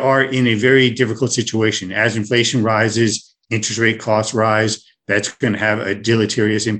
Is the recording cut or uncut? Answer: uncut